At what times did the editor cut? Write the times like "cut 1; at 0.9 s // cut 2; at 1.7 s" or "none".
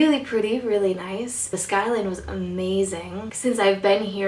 cut 1; at 3.3 s